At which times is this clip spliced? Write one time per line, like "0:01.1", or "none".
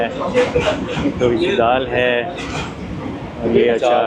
none